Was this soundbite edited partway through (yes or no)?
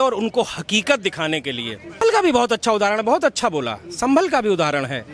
yes